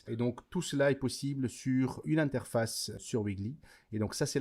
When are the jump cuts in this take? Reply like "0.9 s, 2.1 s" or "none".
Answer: 2.0 s, 3.0 s